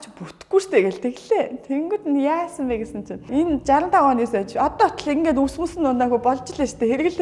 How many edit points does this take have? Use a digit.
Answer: 1